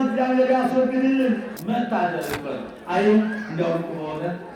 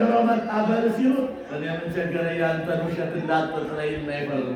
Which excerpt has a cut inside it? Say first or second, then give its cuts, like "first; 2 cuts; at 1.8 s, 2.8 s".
first; 1 cut; at 1.5 s